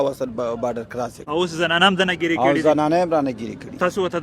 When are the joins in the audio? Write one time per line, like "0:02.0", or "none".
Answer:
0:01.2